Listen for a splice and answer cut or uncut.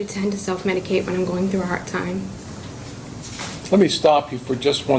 uncut